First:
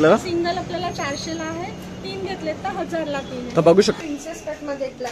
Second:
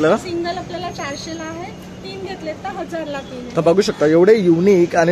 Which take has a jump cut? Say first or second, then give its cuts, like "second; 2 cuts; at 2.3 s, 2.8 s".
first; 1 cut; at 4.0 s